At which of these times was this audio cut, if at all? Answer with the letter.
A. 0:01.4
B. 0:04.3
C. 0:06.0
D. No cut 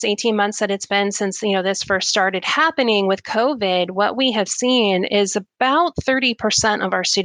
D